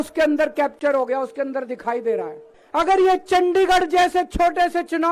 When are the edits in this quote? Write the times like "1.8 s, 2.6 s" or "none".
2.6 s